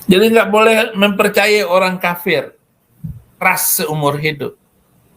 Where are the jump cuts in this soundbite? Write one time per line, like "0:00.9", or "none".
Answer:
0:03.4